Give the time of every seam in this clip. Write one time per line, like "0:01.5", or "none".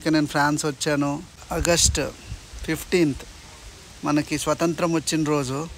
0:01.3